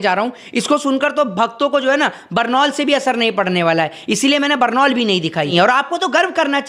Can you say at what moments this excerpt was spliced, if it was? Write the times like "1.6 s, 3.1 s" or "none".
5.5 s

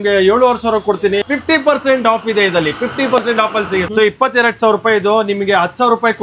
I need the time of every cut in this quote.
1.2 s, 3.9 s

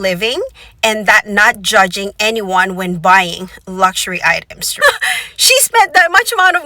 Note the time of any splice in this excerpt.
4.8 s

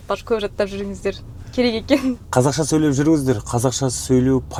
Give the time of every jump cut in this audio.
none

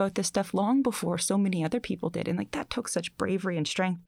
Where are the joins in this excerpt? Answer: none

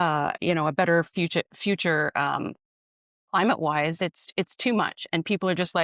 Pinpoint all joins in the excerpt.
none

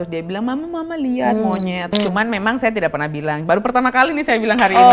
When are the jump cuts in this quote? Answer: 1.9 s

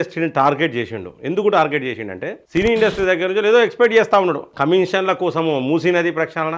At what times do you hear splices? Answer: 4.5 s

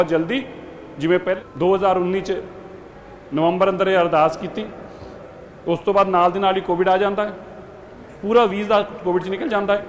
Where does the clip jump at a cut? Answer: 1.4 s

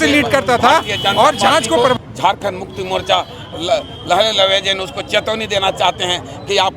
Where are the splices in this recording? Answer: 2.0 s

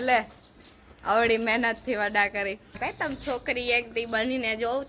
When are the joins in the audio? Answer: 2.8 s

